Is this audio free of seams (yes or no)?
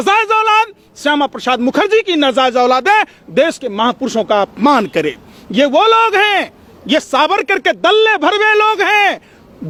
yes